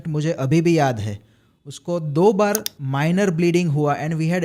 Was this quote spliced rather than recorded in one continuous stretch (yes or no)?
no